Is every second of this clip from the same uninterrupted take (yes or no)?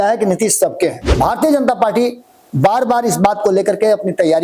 no